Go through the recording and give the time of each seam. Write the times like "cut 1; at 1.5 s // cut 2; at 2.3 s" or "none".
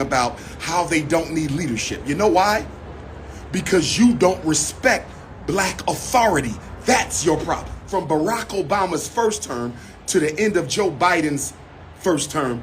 cut 1; at 7.7 s